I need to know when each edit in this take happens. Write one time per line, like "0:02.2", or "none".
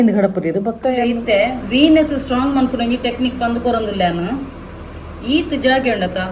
0:01.1

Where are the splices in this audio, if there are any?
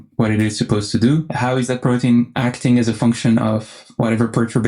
0:01.3
0:02.3

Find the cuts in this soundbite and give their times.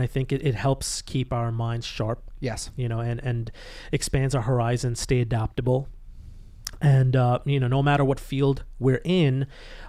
none

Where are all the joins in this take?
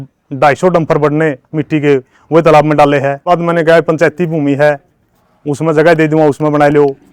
0:03.2

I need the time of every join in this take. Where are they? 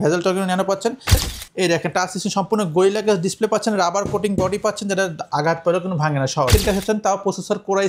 0:01.3
0:06.5

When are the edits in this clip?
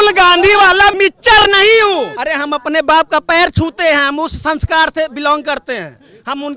0:01.0
0:02.2

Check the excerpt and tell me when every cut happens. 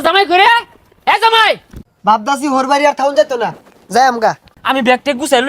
0:01.8
0:04.5

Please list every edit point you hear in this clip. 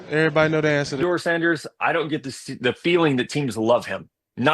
0:01.0

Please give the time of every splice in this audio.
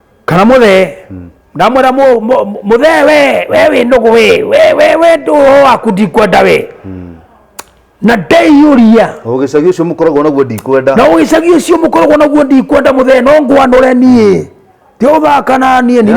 none

